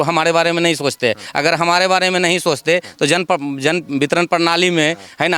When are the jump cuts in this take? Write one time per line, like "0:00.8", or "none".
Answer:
none